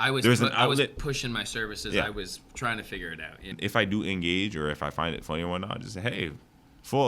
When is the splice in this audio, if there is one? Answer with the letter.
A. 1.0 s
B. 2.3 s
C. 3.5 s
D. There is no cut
C